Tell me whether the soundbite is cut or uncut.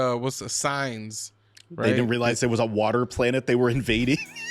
uncut